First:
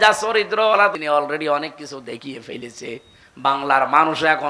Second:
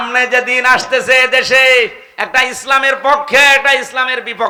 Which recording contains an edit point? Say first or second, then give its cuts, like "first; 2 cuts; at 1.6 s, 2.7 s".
first; 1 cut; at 0.9 s